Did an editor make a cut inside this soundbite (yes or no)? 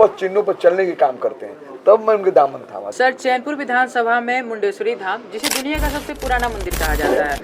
yes